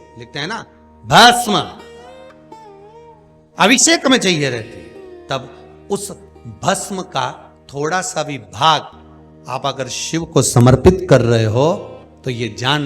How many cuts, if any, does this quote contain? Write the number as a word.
two